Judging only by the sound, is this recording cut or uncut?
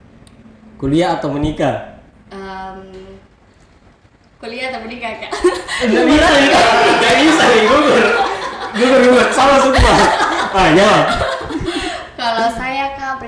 uncut